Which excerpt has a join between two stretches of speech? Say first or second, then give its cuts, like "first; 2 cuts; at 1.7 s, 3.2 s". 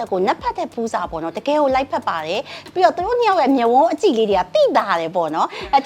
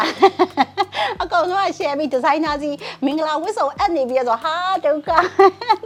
first; 1 cut; at 2.6 s